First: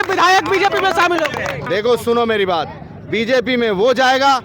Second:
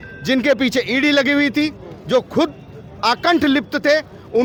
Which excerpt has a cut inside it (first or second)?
first